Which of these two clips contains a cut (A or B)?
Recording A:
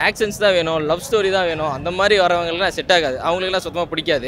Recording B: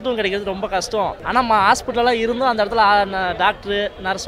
B